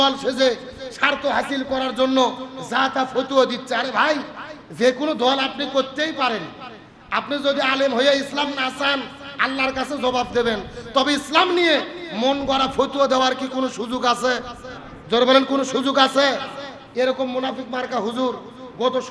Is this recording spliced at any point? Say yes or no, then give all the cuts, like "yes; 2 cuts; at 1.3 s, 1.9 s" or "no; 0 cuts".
no; 0 cuts